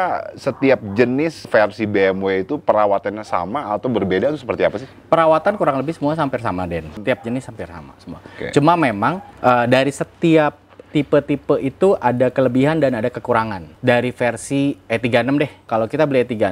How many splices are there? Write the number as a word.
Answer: six